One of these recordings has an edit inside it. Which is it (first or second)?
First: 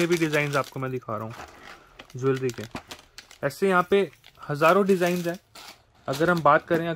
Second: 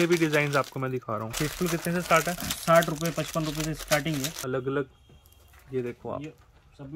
second